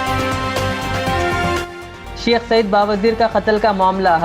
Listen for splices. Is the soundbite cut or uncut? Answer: cut